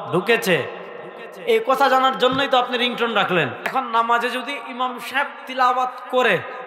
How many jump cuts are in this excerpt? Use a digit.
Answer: 1